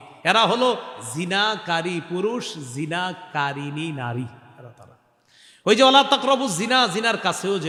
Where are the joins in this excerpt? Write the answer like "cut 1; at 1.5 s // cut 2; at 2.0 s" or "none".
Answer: none